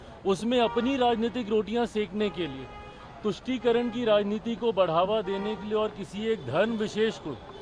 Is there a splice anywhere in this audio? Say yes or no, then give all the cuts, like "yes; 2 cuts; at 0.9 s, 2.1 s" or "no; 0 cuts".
no; 0 cuts